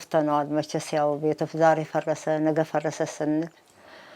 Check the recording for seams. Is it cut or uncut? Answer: uncut